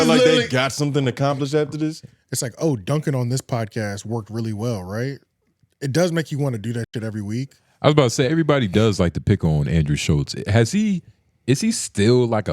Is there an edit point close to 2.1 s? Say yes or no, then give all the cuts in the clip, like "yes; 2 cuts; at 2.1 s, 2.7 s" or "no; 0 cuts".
yes; 2 cuts; at 2.1 s, 7.6 s